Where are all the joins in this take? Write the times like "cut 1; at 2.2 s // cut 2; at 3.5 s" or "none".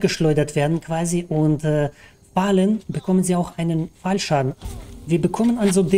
cut 1; at 4.6 s